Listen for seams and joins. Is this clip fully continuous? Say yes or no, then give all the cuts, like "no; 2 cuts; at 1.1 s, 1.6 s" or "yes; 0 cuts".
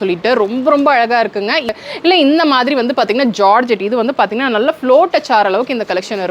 no; 1 cut; at 1.7 s